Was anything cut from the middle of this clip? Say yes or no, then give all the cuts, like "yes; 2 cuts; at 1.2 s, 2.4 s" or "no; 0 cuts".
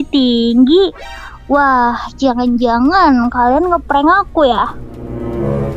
no; 0 cuts